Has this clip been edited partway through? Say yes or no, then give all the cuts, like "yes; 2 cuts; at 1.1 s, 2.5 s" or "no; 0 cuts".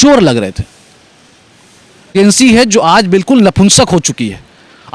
yes; 1 cut; at 2.1 s